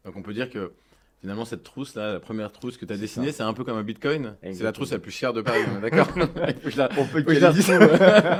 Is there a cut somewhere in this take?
no; 0 cuts

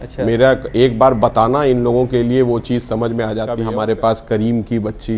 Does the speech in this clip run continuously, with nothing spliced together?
no; 1 cut; at 3.6 s

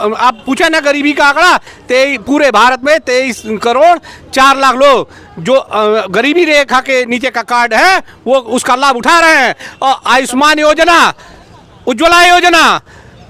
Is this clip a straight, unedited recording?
yes; 0 cuts

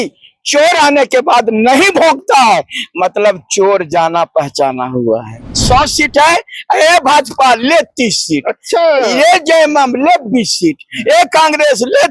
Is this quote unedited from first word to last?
no; 1 cut; at 5.5 s

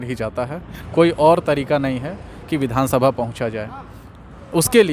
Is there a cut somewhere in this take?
no; 0 cuts

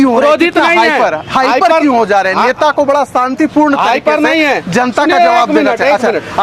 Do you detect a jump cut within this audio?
no; 0 cuts

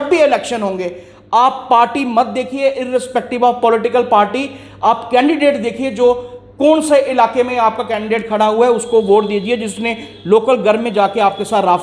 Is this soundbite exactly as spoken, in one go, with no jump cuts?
yes; 0 cuts

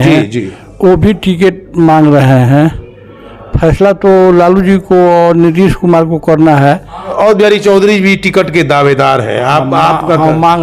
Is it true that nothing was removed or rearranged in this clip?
no; 1 cut; at 7.1 s

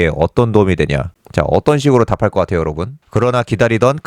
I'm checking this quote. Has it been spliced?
yes; 1 cut; at 2.9 s

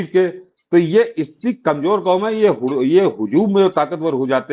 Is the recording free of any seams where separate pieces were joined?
yes; 0 cuts

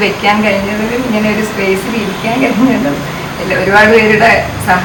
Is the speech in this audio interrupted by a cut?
no; 0 cuts

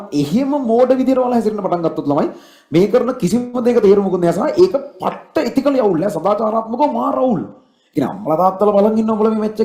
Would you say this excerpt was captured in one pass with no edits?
yes; 0 cuts

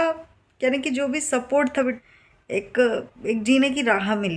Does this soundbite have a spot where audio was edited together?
yes; 1 cut; at 2.0 s

